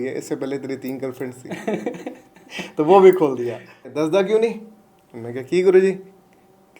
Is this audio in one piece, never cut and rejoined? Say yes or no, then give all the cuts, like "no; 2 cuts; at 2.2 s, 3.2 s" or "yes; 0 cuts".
no; 1 cut; at 3.9 s